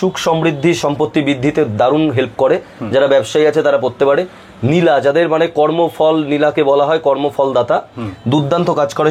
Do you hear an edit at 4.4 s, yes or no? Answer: no